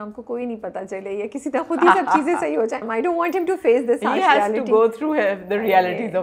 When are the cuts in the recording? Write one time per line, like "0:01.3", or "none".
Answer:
0:02.8